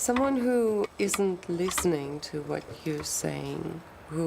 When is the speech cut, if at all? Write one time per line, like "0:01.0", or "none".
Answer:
0:00.9